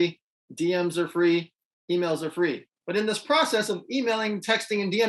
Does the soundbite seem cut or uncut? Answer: cut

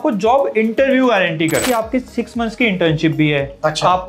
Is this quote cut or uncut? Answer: cut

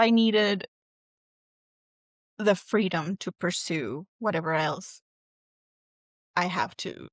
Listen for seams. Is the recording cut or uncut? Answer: uncut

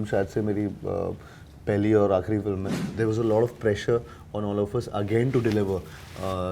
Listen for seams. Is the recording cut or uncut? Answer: cut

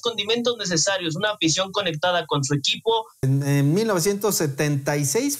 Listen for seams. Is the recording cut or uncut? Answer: cut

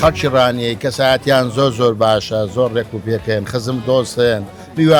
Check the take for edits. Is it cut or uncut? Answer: uncut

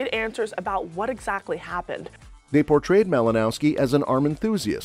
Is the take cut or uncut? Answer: uncut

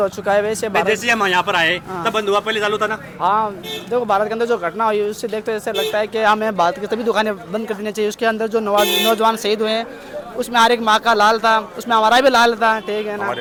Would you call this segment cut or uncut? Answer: uncut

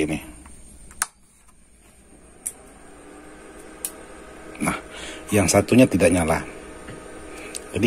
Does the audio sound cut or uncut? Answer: uncut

